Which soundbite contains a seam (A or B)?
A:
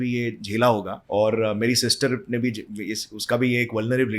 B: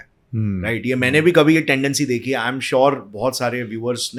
A